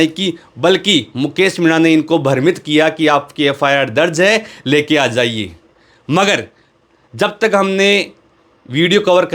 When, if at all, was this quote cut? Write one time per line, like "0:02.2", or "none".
none

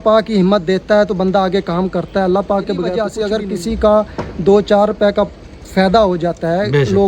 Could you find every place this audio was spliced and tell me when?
0:03.1

